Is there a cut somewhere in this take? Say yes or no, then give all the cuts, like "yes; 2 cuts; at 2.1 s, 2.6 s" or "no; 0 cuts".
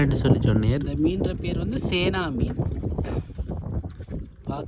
no; 0 cuts